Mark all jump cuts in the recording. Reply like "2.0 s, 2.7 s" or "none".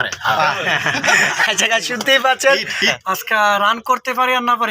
3.0 s